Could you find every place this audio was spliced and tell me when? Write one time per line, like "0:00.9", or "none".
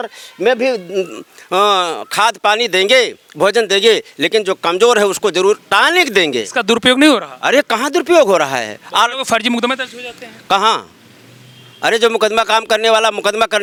none